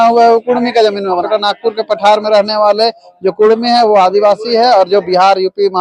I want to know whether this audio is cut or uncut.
cut